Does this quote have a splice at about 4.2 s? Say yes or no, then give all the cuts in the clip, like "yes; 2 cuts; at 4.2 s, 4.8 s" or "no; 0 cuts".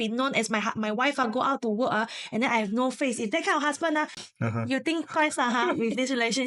yes; 1 cut; at 4.2 s